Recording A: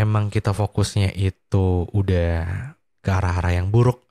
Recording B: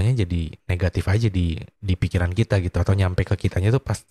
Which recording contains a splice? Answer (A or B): B